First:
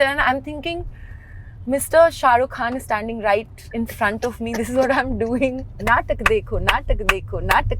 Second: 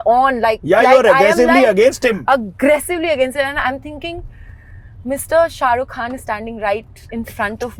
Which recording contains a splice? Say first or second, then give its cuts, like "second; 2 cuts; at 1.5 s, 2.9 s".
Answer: first; 1 cut; at 5.8 s